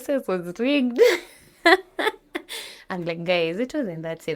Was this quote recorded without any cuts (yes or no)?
yes